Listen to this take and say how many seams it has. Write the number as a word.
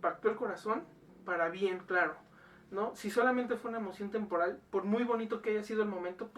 one